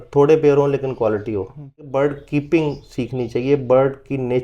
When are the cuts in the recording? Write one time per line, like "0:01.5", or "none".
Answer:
0:01.8